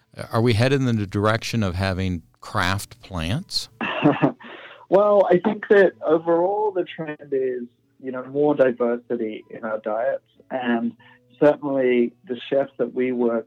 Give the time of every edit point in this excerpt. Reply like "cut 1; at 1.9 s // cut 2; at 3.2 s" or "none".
cut 1; at 3.6 s